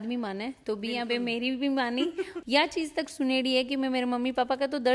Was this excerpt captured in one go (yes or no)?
no